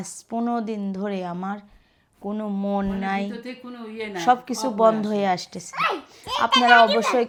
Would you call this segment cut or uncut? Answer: uncut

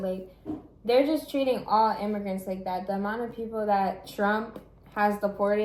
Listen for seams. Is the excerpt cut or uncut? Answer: uncut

